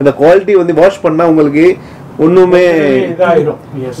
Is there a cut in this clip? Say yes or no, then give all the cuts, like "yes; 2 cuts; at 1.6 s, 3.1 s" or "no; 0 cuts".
no; 0 cuts